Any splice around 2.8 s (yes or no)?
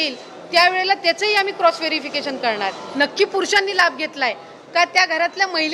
yes